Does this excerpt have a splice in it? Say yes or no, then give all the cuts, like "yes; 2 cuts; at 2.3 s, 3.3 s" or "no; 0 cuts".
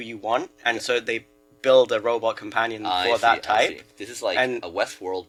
no; 0 cuts